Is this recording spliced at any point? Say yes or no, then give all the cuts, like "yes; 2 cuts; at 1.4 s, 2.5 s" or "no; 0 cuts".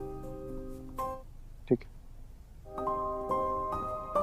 no; 0 cuts